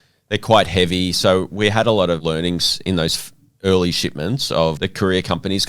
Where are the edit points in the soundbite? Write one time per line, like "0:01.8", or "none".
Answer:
0:02.2
0:04.8